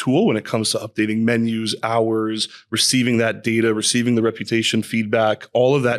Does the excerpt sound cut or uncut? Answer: uncut